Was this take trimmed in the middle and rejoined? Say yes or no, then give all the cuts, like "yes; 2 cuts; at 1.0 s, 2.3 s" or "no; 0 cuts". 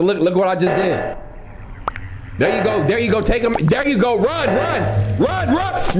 yes; 1 cut; at 1.1 s